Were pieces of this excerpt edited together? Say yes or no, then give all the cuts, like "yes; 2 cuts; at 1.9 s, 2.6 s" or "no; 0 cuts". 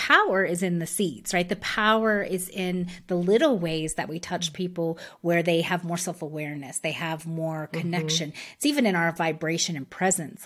no; 0 cuts